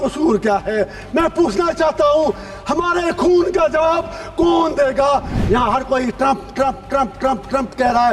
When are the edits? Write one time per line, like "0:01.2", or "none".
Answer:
0:05.3